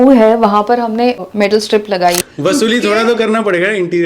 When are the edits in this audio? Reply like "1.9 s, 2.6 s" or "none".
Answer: 1.2 s, 2.3 s